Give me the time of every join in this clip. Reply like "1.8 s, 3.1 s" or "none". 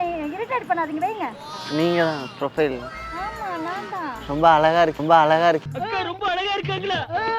1.5 s, 5.0 s

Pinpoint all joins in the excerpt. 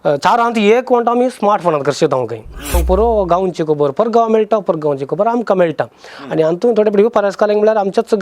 2.8 s

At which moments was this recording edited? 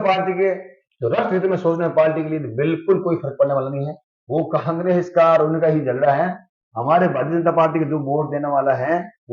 none

